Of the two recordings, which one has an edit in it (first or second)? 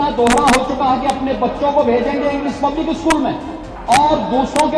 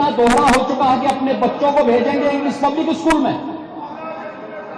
first